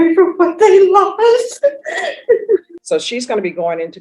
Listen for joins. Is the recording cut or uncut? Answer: cut